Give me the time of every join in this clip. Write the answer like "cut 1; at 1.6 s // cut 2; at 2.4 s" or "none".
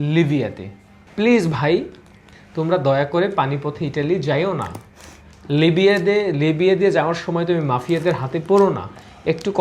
cut 1; at 1.0 s

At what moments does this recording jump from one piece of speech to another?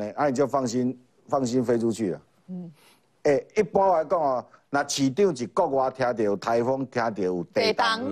none

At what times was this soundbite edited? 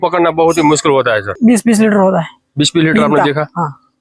cut 1; at 1.3 s

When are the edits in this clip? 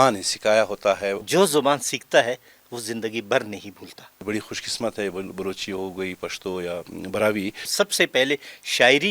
cut 1; at 1.2 s // cut 2; at 4.2 s // cut 3; at 7.7 s

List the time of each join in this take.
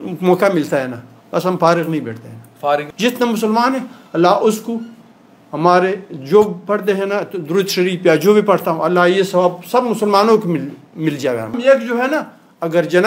cut 1; at 2.9 s // cut 2; at 11.6 s

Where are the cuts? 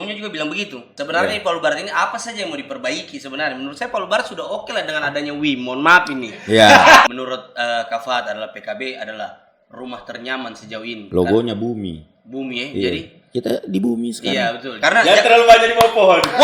cut 1; at 0.9 s // cut 2; at 7.1 s // cut 3; at 14.7 s

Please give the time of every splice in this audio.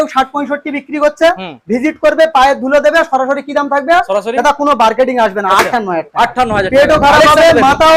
none

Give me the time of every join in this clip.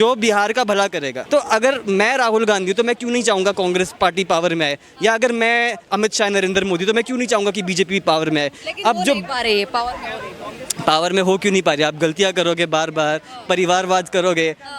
cut 1; at 1.2 s

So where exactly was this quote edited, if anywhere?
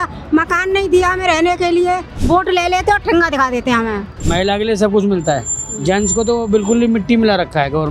cut 1; at 2.1 s // cut 2; at 4.1 s

